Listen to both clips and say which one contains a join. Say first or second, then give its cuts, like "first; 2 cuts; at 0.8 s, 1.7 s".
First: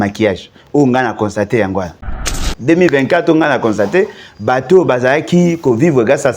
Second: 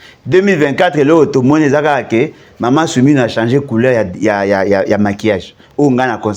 first; 1 cut; at 2.4 s